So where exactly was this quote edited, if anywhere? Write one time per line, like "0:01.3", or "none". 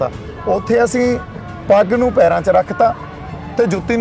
none